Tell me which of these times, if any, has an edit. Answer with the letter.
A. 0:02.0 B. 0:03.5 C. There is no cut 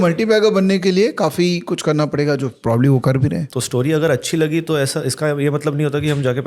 B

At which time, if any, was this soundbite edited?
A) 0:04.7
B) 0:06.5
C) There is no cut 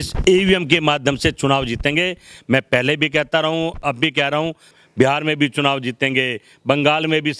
A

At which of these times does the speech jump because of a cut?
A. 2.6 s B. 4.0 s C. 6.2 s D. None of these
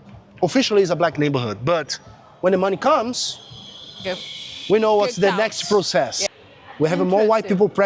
C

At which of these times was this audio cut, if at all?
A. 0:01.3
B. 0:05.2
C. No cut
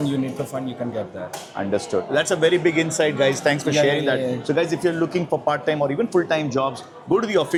C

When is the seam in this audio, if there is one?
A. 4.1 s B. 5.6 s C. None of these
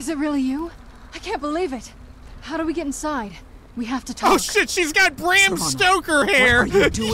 A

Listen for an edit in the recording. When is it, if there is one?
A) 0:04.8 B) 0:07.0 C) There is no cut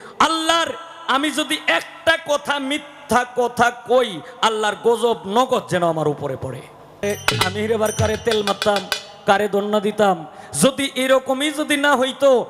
B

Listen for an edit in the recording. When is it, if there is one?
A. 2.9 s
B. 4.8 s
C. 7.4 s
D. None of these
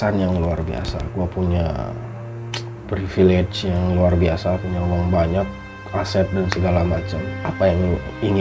C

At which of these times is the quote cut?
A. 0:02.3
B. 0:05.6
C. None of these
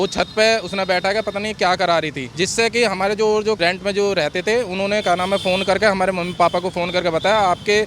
C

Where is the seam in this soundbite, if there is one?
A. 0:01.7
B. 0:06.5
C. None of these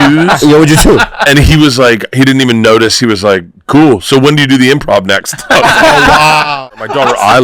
B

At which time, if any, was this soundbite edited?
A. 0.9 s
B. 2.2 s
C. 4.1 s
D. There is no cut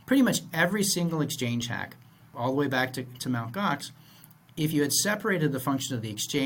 B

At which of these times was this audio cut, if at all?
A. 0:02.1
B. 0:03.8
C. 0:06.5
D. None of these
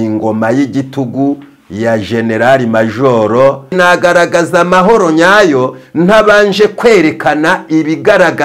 B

